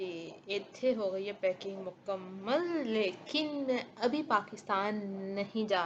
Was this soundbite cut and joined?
no; 0 cuts

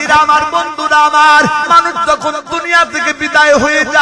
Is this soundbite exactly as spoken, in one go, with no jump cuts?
no; 1 cut; at 1.7 s

